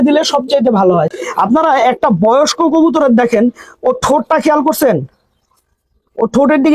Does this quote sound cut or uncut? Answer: cut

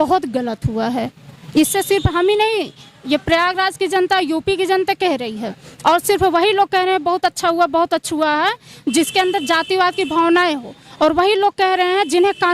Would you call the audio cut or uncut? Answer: uncut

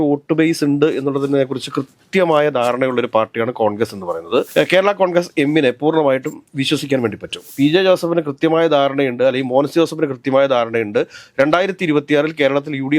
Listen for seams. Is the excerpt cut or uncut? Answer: cut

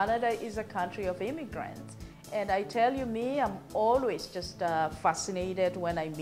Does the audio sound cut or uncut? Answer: uncut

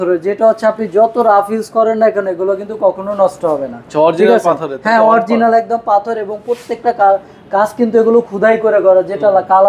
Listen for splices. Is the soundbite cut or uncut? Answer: uncut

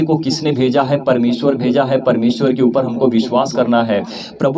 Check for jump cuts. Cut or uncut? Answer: uncut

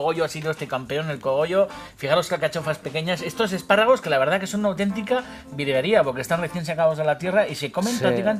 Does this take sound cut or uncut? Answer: cut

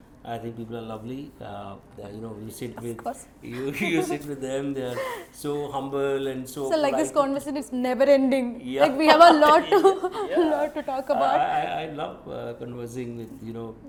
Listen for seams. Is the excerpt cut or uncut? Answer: uncut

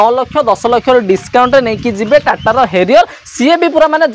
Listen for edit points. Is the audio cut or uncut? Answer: uncut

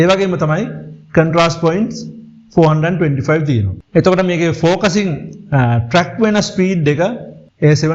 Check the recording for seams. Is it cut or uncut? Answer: uncut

